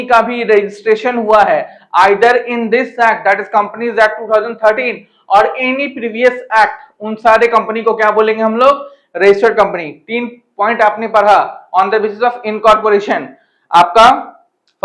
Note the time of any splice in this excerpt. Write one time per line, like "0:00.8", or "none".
none

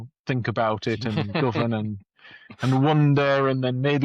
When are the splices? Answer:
none

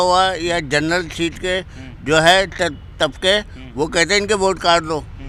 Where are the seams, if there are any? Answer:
none

